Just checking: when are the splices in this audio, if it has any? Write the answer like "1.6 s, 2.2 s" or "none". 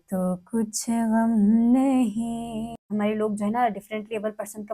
2.9 s

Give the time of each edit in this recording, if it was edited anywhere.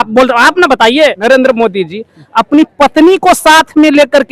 1.2 s

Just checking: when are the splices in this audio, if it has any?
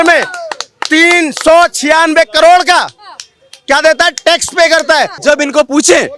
5.1 s

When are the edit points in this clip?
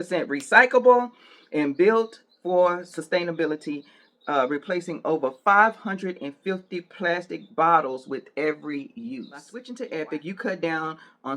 9.7 s

